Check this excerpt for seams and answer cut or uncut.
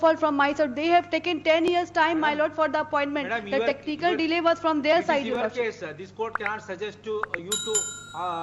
uncut